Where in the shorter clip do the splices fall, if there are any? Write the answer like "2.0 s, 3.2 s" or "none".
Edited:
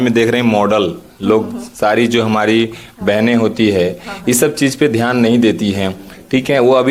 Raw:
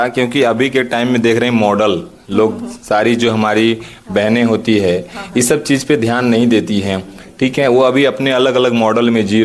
none